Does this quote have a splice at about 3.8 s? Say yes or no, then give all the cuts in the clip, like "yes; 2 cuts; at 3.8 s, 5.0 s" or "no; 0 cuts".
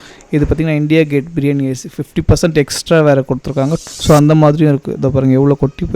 yes; 1 cut; at 3.8 s